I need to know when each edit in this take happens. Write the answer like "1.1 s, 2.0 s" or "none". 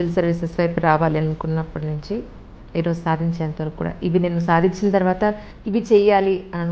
none